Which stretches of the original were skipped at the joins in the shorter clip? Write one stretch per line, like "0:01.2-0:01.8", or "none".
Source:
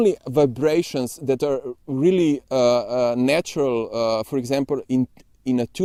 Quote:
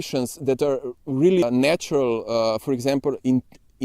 0:02.2-0:03.1